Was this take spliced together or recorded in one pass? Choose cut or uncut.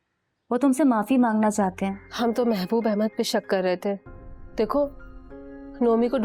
cut